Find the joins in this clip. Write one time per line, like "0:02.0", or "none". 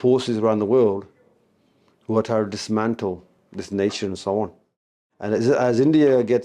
none